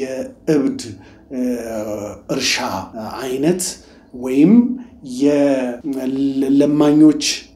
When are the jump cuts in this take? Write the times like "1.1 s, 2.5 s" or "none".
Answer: 2.9 s, 5.8 s